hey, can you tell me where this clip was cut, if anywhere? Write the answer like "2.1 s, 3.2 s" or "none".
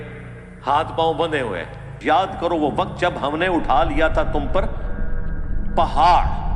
2.0 s